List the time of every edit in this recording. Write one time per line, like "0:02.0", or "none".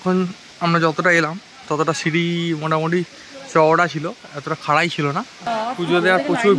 0:05.4